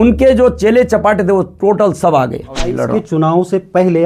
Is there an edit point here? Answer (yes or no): yes